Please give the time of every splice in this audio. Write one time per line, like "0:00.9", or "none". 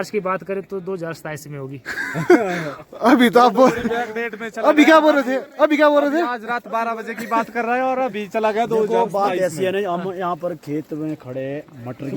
none